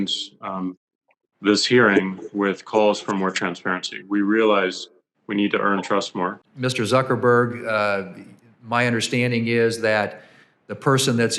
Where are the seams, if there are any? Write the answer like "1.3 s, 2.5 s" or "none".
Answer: 6.4 s